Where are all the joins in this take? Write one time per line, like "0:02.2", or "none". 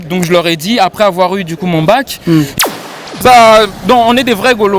0:02.7